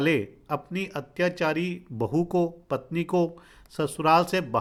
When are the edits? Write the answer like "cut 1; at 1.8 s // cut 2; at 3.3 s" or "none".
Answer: none